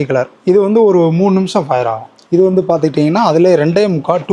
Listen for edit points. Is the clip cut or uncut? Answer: cut